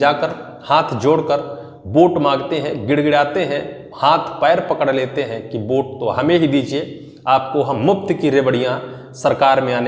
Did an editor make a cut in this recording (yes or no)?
no